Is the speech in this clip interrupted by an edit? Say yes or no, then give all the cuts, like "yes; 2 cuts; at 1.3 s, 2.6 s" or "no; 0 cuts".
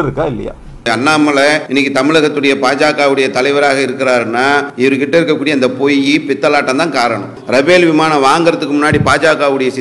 yes; 4 cuts; at 0.9 s, 1.6 s, 4.7 s, 7.3 s